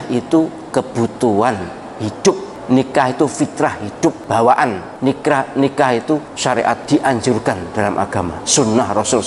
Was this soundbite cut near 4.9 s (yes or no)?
yes